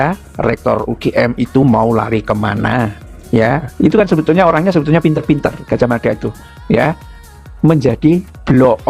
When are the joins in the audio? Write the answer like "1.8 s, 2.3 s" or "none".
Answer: 3.7 s